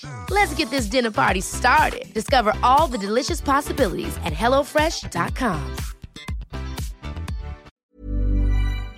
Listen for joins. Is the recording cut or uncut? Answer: cut